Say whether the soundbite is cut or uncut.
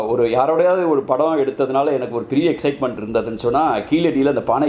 uncut